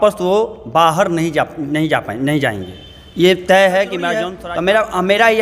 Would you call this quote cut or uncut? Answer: cut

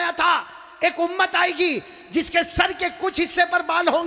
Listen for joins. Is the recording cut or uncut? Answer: uncut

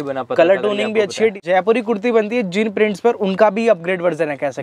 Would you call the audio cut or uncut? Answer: cut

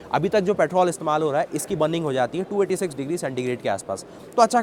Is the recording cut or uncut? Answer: uncut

